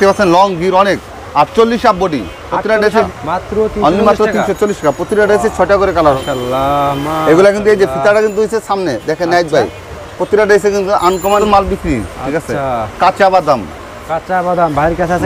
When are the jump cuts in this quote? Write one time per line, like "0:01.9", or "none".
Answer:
0:03.1
0:06.2
0:11.4